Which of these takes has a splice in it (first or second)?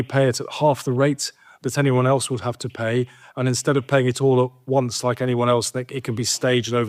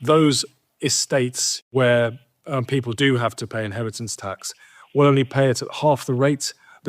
second